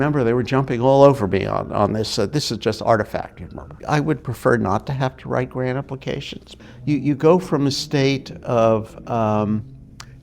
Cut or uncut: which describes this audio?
cut